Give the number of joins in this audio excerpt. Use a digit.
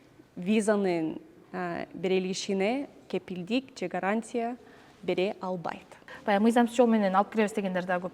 1